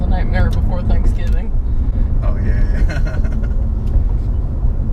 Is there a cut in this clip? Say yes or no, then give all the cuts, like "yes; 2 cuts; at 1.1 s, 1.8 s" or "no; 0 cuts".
no; 0 cuts